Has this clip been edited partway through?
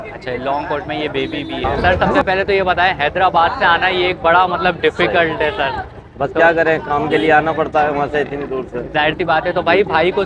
yes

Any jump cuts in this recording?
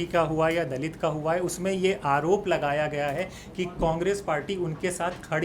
no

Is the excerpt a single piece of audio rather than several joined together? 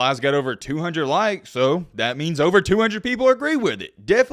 yes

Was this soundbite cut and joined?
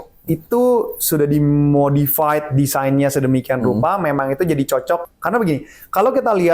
yes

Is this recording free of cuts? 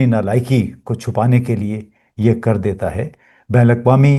yes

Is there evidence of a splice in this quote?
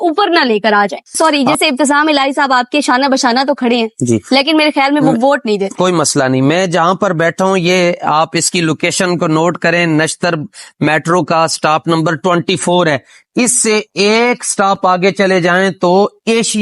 yes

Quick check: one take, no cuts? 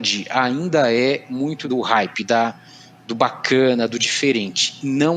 no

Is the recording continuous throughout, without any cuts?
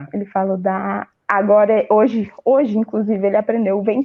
yes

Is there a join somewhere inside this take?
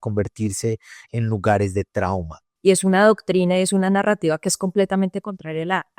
yes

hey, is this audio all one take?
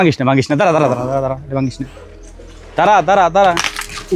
yes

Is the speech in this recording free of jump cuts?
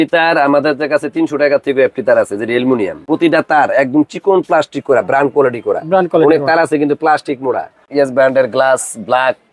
no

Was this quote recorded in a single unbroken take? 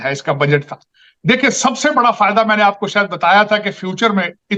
yes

